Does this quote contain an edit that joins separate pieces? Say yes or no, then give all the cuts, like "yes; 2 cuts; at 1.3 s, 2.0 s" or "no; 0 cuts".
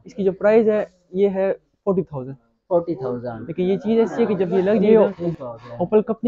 yes; 1 cut; at 4.8 s